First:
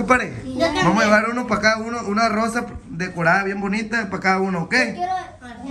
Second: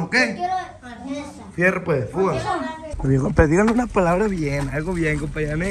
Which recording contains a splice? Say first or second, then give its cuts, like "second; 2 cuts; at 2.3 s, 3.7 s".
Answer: second; 1 cut; at 2.8 s